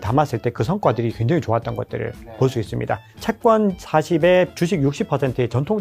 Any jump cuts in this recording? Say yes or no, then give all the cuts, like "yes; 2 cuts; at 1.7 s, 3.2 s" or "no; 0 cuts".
yes; 2 cuts; at 3.1 s, 4.5 s